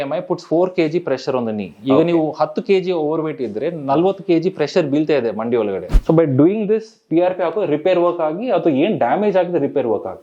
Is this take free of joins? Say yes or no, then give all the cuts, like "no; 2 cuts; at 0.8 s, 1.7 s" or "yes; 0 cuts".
no; 1 cut; at 5.9 s